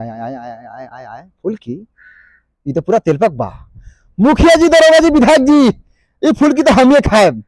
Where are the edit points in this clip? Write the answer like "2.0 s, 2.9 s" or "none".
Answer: none